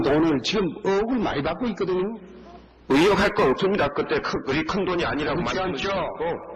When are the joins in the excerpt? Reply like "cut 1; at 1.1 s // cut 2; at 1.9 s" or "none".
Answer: cut 1; at 5.4 s